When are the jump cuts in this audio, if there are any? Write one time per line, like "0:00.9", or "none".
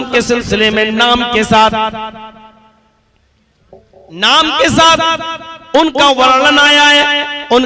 none